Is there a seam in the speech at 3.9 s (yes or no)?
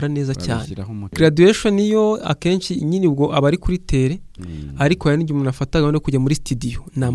no